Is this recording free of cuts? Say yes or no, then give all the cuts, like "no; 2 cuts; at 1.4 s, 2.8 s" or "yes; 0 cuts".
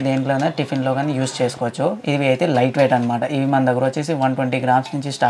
yes; 0 cuts